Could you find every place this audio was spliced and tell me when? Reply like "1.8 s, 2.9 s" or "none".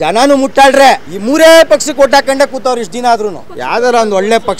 1.1 s, 3.5 s